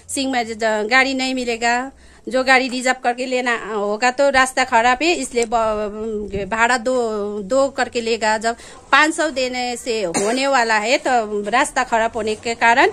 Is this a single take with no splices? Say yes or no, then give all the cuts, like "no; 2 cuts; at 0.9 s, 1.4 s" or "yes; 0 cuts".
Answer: yes; 0 cuts